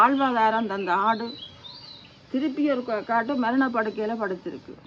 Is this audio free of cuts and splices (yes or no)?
yes